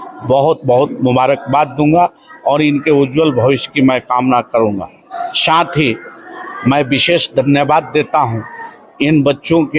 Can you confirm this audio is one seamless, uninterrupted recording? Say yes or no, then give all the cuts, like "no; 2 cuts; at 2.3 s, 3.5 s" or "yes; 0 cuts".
yes; 0 cuts